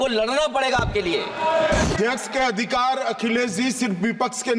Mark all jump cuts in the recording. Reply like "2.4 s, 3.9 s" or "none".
1.9 s